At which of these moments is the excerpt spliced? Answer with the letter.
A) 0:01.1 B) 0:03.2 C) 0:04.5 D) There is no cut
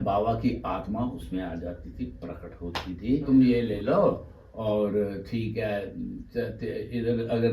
B